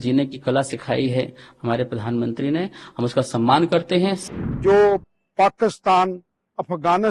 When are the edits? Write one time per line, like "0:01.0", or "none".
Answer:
0:04.2